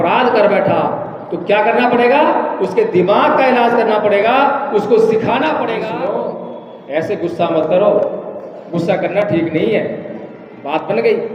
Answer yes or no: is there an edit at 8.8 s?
no